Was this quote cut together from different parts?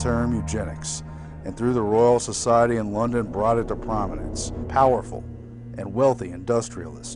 yes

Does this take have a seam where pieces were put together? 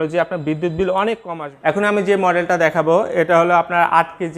no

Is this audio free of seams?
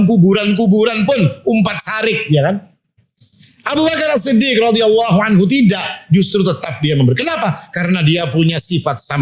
yes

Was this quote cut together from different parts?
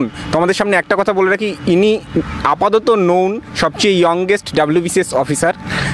no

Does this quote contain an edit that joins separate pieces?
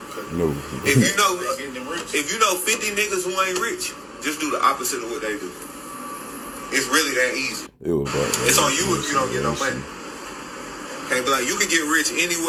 no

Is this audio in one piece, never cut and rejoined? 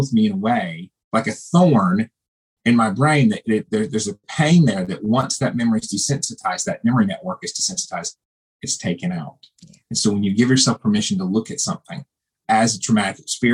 yes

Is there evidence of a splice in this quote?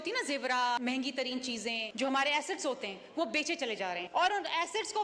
yes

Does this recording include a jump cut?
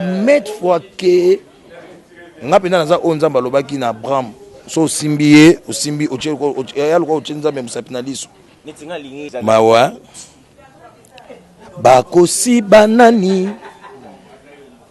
yes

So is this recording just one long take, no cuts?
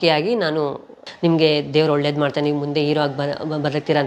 no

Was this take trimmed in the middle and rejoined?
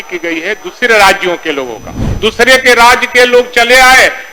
yes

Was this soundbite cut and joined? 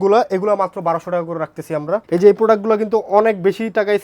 yes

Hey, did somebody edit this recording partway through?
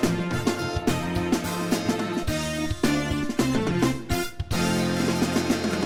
no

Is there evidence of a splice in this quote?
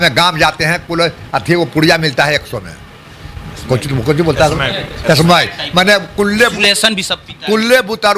no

